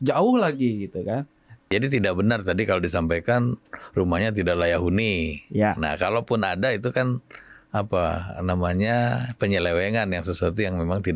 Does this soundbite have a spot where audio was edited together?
yes; 1 cut; at 1.7 s

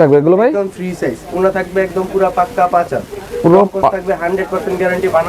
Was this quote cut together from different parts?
no; 0 cuts

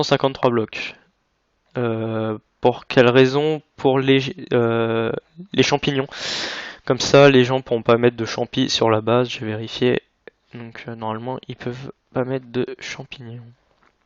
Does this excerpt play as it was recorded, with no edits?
no; 1 cut; at 9.6 s

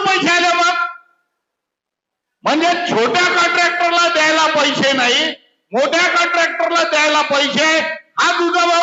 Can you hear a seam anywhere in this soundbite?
no; 0 cuts

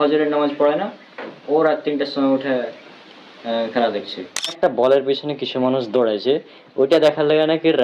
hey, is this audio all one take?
no; 1 cut; at 4.6 s

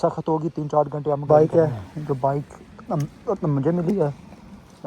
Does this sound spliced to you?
yes; 1 cut; at 1.2 s

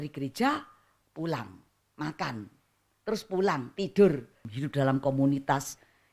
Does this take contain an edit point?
yes; 1 cut; at 4.5 s

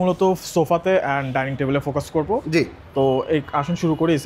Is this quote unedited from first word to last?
yes; 0 cuts

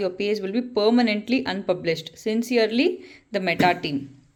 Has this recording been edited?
no; 0 cuts

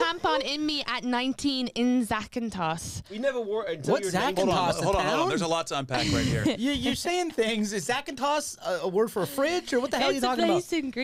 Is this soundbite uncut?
yes; 0 cuts

